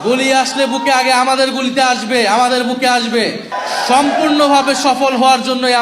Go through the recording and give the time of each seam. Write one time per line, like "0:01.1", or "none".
0:03.5